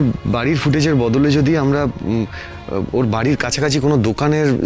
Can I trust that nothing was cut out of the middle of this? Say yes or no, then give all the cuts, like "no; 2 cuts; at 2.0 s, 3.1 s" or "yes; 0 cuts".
yes; 0 cuts